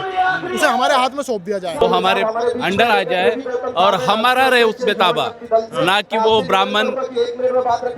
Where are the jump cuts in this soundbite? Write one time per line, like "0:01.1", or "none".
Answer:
0:01.8